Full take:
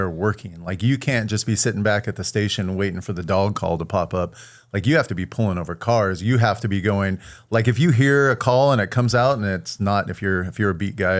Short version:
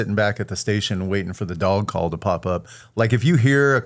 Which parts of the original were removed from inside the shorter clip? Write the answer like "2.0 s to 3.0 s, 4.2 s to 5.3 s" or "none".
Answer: 4.5 s to 7.3 s